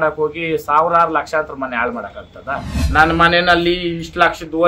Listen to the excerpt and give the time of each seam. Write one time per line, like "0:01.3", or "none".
0:02.7